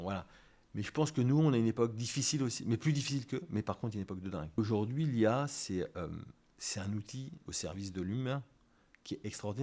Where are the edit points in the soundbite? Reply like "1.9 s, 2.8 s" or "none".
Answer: 4.6 s, 7.5 s

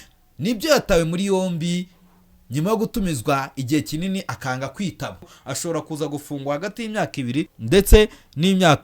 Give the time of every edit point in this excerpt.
5.4 s, 7.6 s

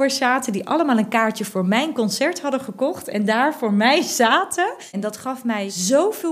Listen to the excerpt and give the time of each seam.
5.3 s

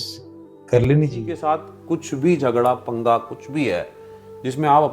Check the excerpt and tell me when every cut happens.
1.3 s

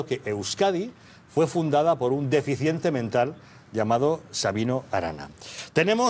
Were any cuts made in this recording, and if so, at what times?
3.8 s

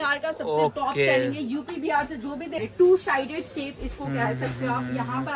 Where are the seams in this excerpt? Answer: 2.6 s

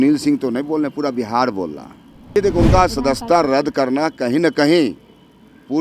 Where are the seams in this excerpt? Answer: 2.3 s

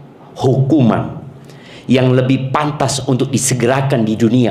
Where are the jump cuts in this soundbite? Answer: none

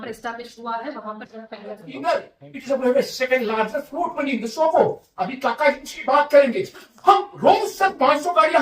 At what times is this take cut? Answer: 2.0 s

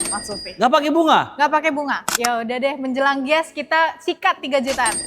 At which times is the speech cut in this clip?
2.1 s

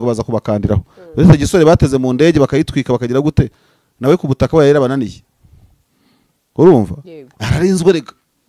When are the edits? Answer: none

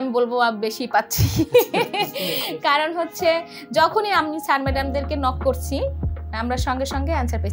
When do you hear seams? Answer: none

